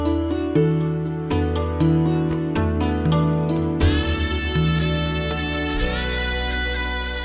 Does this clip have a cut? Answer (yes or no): no